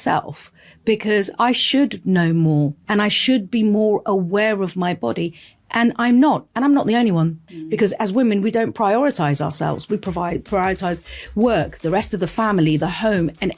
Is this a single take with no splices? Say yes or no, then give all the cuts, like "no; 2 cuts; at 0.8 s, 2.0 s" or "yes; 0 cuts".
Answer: no; 2 cuts; at 2.8 s, 7.4 s